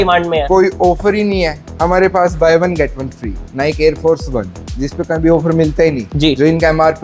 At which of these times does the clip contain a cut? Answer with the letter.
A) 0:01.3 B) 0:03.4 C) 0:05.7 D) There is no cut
B